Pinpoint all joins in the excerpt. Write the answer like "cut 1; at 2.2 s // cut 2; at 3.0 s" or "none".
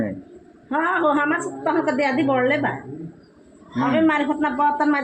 none